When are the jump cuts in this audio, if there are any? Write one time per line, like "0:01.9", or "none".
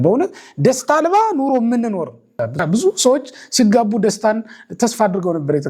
0:02.6